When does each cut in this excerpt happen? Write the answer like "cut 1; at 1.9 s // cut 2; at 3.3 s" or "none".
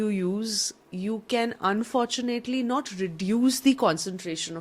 none

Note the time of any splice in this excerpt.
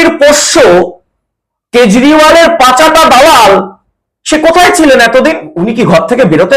cut 1; at 5.5 s

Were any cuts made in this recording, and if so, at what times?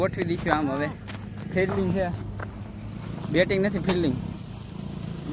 none

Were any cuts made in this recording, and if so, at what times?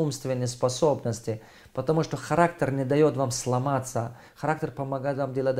none

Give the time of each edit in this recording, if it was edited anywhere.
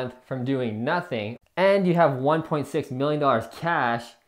cut 1; at 1.3 s

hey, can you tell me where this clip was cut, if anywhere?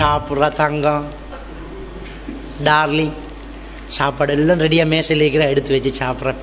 none

